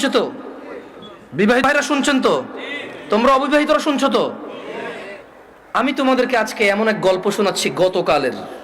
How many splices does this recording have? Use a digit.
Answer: 1